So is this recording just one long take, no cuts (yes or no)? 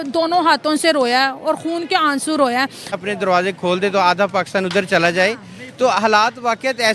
yes